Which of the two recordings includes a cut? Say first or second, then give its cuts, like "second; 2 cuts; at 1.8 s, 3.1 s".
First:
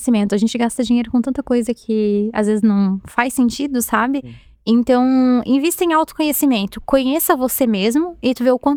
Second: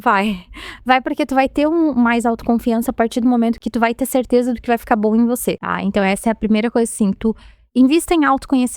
second; 2 cuts; at 3.6 s, 5.7 s